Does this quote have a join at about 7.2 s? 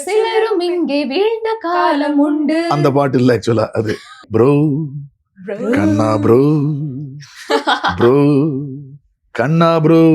no; 1 cut; at 4.1 s

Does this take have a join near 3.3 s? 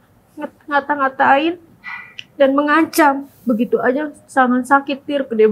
yes; 1 cut; at 3.3 s

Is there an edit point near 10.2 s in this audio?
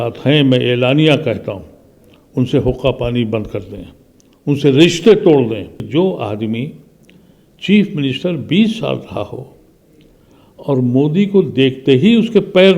no; 1 cut; at 5.9 s

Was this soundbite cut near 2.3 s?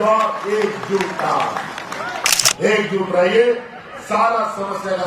yes; 1 cut; at 2.3 s

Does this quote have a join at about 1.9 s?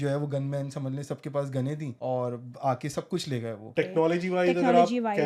yes; 2 cuts; at 1.9 s, 3.7 s

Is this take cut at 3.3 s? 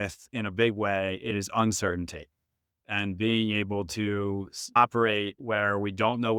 no; 2 cuts; at 1.3 s, 4.8 s

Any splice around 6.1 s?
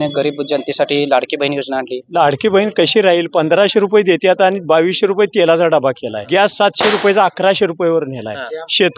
yes; 2 cuts; at 2.0 s, 6.1 s

